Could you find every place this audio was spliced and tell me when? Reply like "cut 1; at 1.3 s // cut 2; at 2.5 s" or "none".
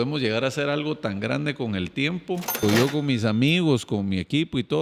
cut 1; at 2.6 s